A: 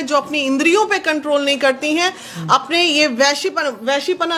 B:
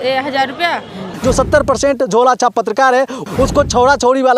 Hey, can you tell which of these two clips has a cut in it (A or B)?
B